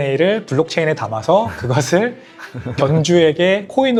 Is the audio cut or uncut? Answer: uncut